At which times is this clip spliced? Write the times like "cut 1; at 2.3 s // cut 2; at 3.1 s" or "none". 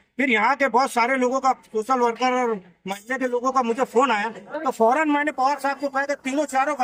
none

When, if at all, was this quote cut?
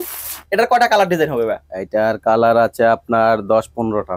none

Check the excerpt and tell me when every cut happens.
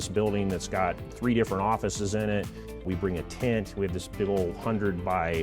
cut 1; at 2.8 s

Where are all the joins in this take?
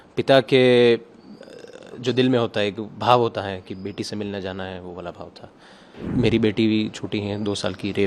cut 1; at 6.0 s

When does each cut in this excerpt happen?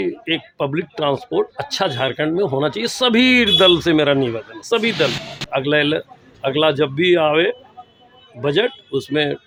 none

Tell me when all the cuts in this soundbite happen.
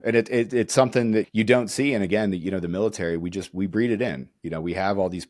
cut 1; at 1.3 s

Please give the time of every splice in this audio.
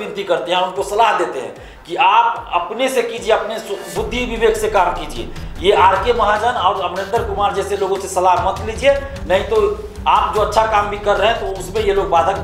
none

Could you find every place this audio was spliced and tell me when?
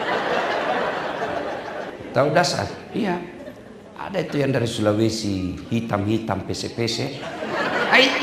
cut 1; at 1.9 s

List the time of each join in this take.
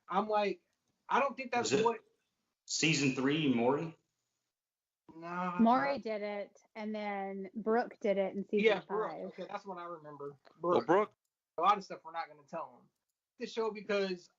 cut 1; at 11.2 s // cut 2; at 13.4 s

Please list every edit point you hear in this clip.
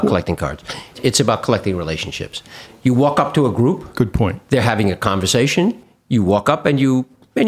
cut 1; at 0.9 s // cut 2; at 2.7 s

